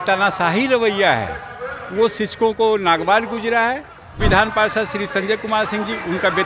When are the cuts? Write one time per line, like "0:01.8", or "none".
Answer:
0:04.2